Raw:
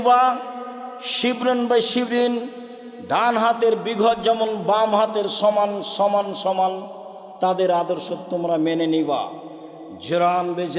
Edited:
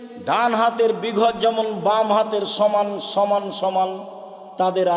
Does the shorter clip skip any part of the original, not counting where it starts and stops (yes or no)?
no